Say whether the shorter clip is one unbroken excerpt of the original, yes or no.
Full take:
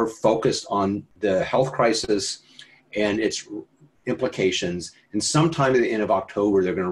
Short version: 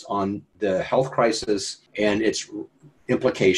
no